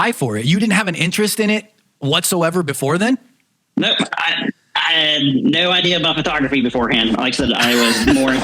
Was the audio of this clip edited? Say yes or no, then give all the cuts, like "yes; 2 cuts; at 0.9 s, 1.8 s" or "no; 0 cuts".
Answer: no; 0 cuts